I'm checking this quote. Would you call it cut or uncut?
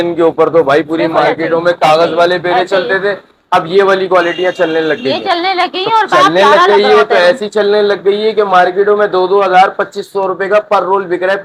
uncut